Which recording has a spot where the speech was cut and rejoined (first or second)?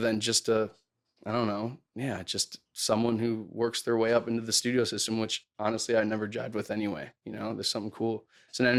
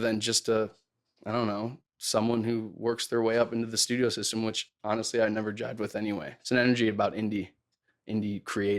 second